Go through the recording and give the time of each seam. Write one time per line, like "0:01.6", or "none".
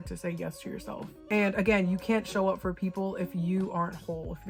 none